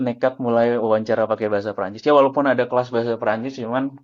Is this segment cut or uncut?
uncut